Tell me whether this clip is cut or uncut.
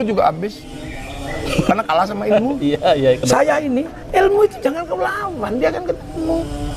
cut